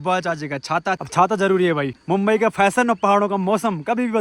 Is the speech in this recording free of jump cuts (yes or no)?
no